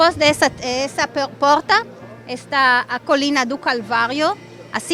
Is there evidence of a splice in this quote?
no; 0 cuts

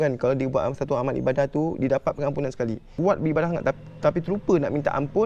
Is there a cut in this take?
yes; 1 cut; at 2.9 s

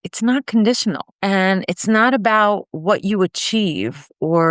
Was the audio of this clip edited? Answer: yes; 1 cut; at 1.1 s

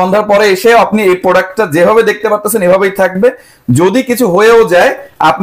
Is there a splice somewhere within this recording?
no; 0 cuts

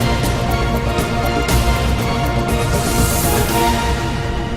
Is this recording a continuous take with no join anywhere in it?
yes; 0 cuts

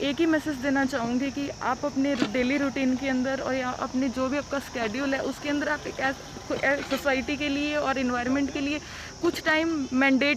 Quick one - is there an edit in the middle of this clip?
no; 0 cuts

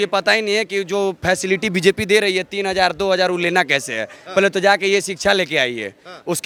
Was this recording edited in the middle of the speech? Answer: no; 0 cuts

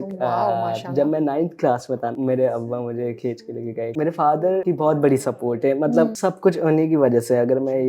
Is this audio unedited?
no; 4 cuts; at 2.1 s, 3.9 s, 4.6 s, 6.2 s

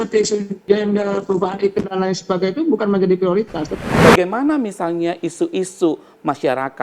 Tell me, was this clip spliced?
yes; 1 cut; at 3.7 s

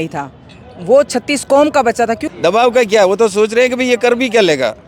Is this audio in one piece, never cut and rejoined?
no; 1 cut; at 2.2 s

